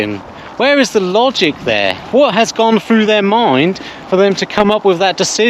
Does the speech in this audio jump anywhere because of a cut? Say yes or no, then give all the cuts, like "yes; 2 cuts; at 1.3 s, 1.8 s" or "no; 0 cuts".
no; 0 cuts